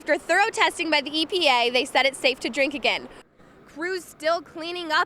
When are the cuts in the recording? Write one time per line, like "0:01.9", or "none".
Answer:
0:03.3